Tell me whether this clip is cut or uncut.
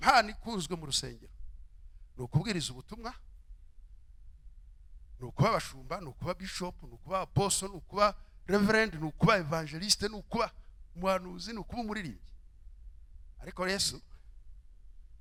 uncut